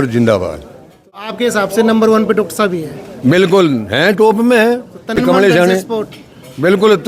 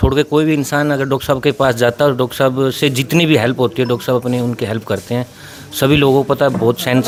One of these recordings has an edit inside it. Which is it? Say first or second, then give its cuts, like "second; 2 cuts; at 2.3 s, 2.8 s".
first; 2 cuts; at 1.3 s, 5.2 s